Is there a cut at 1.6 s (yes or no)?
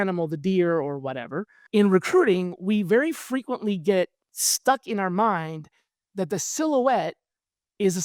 yes